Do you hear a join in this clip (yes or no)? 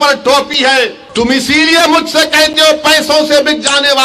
yes